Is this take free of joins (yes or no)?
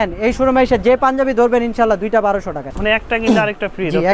no